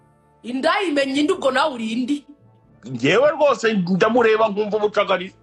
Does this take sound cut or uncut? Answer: uncut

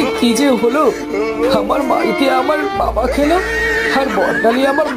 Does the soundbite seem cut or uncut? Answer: uncut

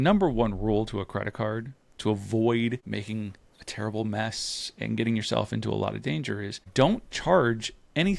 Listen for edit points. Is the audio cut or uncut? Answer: cut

